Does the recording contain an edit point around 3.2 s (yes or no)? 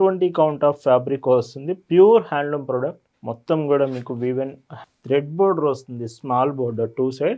no